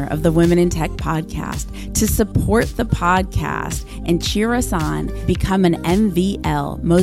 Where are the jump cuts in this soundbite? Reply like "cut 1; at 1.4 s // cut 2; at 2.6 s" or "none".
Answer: none